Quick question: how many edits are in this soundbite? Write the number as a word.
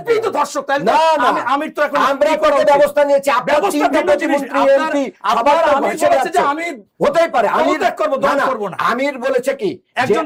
zero